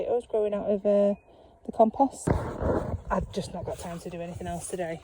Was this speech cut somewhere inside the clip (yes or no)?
yes